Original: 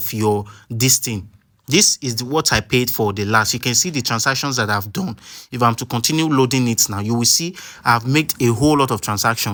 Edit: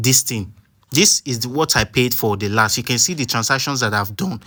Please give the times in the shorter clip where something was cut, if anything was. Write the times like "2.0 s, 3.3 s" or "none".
none